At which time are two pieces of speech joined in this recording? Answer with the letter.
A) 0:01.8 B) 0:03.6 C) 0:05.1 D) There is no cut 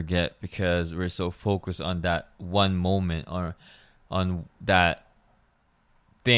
D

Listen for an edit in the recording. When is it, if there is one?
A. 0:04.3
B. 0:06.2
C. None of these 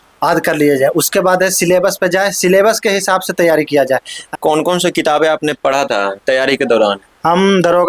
A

